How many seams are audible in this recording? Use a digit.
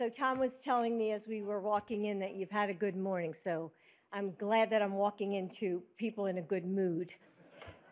2